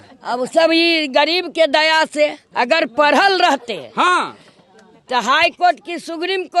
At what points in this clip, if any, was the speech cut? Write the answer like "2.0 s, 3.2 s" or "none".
2.4 s